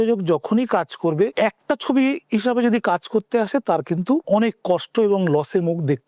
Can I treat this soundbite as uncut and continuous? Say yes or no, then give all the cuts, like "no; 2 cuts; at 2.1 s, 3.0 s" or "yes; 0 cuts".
no; 2 cuts; at 1.3 s, 4.2 s